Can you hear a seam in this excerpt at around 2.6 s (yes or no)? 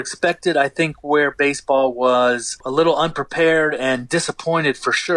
yes